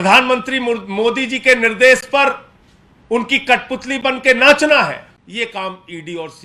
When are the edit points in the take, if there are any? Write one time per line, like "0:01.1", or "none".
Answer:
0:05.2

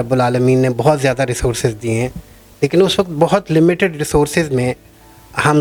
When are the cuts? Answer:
none

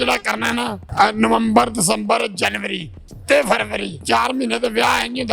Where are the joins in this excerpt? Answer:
0:04.0

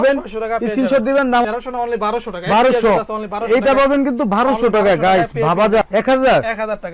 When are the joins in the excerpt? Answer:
0:01.4
0:05.8

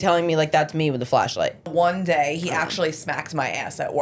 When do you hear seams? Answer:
0:01.7

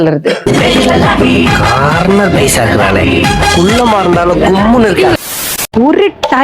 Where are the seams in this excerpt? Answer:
0:05.4

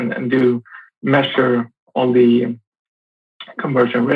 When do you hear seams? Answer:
none

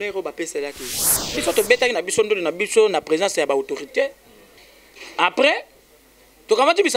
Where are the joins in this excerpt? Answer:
0:01.4

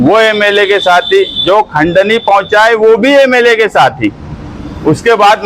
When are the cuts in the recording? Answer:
none

